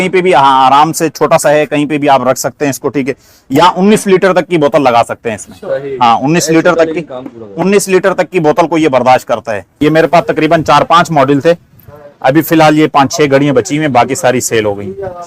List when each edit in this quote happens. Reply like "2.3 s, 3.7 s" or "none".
9.6 s